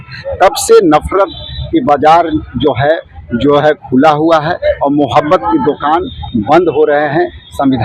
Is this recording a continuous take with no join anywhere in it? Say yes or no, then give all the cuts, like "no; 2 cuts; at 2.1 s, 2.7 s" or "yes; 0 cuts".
yes; 0 cuts